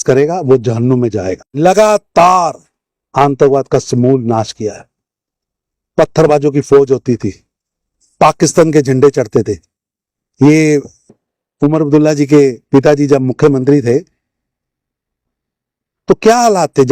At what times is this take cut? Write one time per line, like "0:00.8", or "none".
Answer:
0:01.3